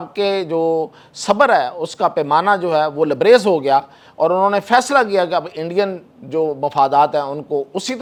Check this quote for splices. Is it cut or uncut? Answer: uncut